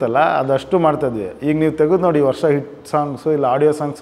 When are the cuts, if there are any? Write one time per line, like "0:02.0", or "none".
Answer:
none